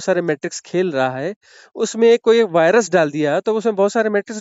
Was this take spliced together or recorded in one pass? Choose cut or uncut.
uncut